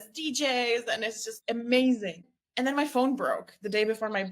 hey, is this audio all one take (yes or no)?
no